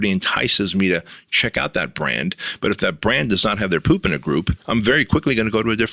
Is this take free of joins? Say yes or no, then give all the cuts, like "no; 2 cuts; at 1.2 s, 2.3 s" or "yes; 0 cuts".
no; 1 cut; at 4.6 s